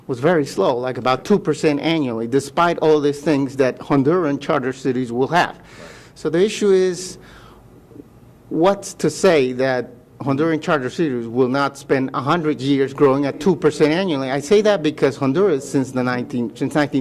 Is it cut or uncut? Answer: cut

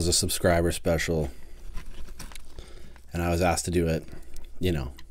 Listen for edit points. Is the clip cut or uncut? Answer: uncut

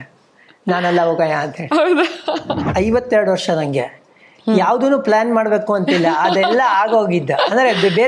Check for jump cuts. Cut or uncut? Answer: cut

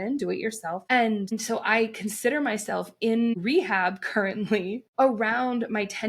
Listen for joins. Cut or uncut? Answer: cut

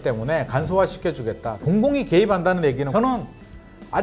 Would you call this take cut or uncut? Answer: cut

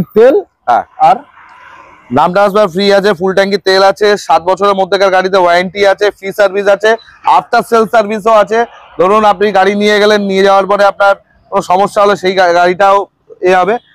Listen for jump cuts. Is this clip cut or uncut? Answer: uncut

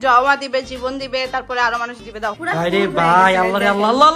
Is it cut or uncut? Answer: cut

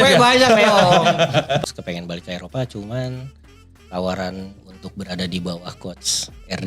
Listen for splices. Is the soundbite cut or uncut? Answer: cut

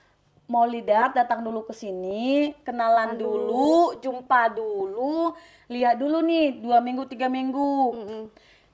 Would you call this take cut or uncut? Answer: uncut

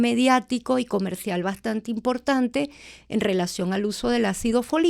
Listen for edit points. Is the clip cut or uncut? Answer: uncut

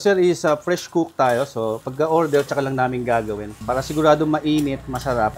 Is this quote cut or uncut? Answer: uncut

